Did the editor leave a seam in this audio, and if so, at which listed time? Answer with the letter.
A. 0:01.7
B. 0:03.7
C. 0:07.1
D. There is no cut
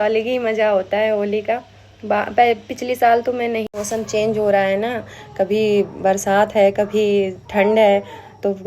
B